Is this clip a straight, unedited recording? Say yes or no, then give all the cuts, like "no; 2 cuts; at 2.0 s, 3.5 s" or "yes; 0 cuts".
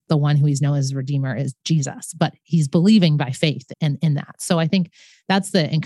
no; 1 cut; at 3.7 s